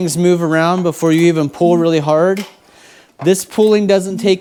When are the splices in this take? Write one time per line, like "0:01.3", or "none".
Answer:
none